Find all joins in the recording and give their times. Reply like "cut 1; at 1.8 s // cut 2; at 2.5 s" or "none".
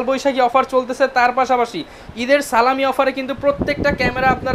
none